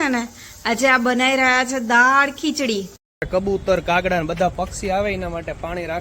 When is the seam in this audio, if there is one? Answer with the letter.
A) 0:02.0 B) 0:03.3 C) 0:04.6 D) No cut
B